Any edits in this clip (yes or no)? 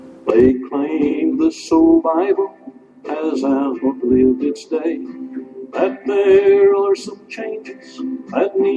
no